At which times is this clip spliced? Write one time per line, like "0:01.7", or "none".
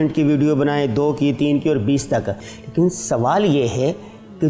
0:02.5